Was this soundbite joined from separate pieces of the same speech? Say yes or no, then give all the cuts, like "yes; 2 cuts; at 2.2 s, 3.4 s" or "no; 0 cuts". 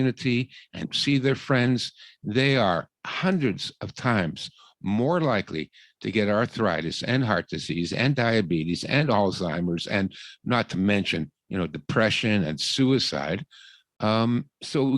yes; 1 cut; at 0.9 s